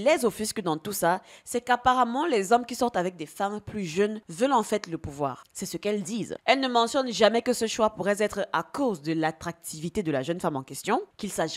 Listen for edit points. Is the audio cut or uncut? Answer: uncut